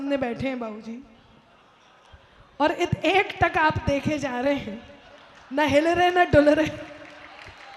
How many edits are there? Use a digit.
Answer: 0